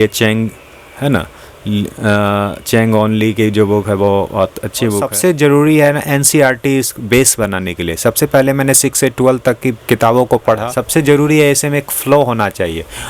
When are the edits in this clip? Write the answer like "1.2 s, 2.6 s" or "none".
5.0 s, 10.7 s